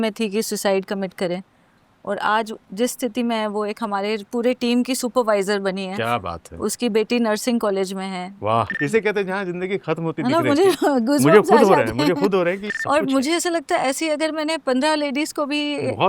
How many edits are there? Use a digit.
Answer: 2